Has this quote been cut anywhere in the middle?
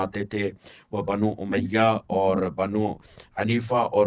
no; 0 cuts

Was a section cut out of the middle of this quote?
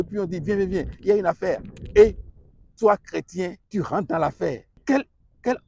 yes; 2 cuts; at 3.6 s, 4.7 s

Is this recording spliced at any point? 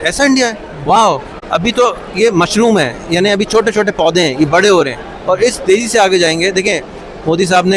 no; 0 cuts

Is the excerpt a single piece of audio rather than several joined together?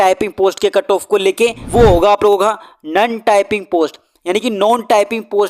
no; 1 cut; at 1.6 s

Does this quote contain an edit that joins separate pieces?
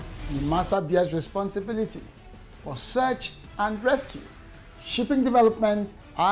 no; 0 cuts

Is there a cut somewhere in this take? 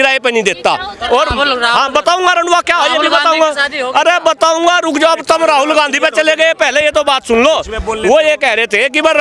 no; 0 cuts

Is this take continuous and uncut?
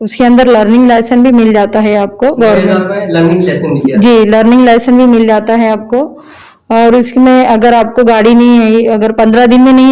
yes; 0 cuts

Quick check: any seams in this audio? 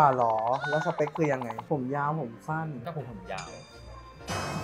no; 0 cuts

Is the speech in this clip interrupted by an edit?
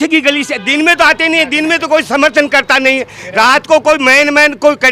no; 0 cuts

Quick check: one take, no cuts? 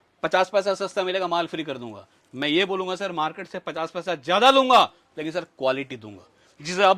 yes; 0 cuts

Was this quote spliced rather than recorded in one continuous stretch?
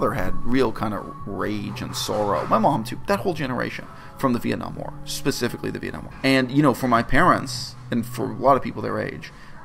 yes; 1 cut; at 6.1 s

